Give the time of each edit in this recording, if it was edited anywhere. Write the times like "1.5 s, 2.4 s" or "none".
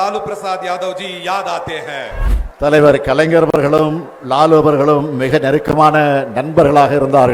2.2 s